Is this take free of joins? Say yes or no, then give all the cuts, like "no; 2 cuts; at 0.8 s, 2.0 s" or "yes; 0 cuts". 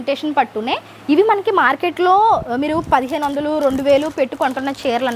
yes; 0 cuts